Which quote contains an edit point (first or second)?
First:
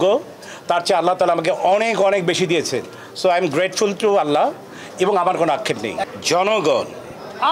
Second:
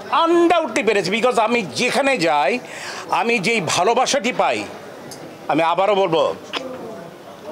first